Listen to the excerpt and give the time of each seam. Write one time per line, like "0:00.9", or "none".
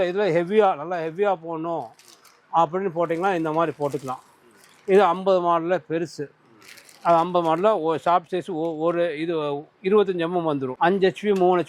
0:10.7